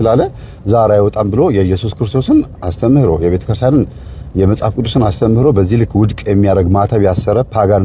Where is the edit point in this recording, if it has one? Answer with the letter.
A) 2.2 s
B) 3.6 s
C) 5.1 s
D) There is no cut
D